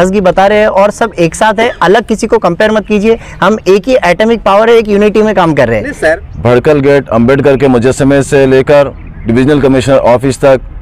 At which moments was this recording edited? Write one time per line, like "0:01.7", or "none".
0:06.2